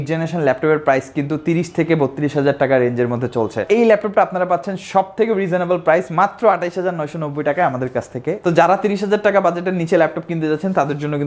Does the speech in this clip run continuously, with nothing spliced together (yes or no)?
no